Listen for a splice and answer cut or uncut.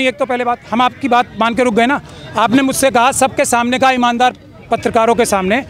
uncut